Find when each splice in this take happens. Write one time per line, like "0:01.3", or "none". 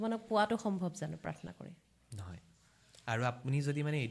none